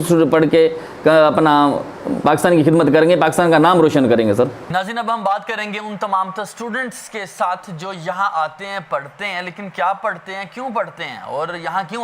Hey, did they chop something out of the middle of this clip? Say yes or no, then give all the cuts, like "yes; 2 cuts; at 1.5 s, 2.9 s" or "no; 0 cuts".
no; 0 cuts